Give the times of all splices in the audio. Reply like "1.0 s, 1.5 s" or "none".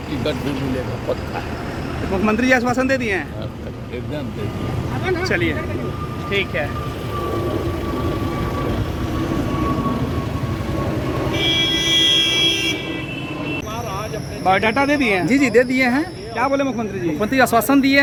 none

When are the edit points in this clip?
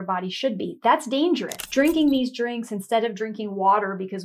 1.6 s

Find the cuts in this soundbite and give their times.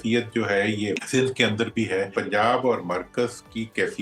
1.0 s, 2.1 s

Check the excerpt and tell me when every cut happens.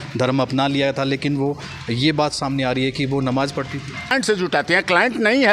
4.1 s

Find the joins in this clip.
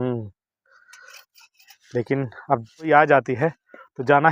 2.9 s

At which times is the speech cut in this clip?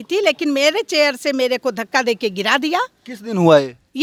none

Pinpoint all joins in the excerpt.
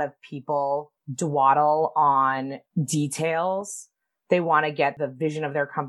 1.0 s, 2.6 s, 5.0 s

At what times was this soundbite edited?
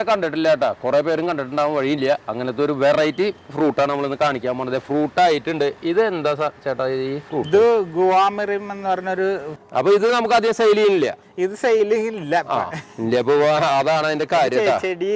9.6 s

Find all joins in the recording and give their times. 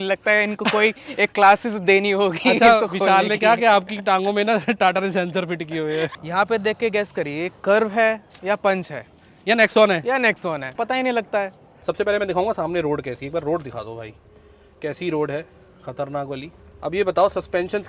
6.2 s, 10.7 s, 11.7 s

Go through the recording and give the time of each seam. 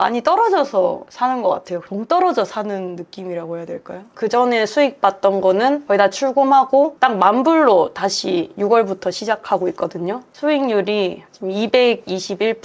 1.1 s, 4.0 s

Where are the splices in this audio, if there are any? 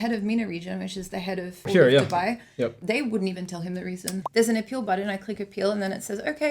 1.6 s, 2.8 s, 4.2 s

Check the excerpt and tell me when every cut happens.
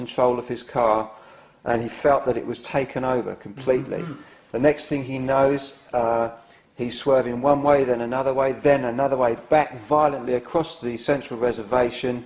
none

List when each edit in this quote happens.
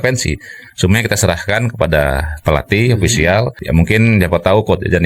3.6 s

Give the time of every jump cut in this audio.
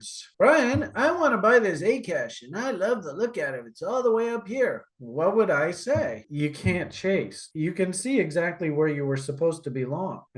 6.2 s

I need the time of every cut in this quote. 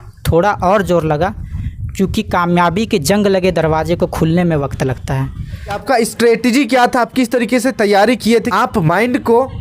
5.8 s, 8.5 s

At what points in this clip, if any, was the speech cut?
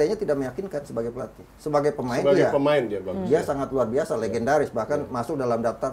none

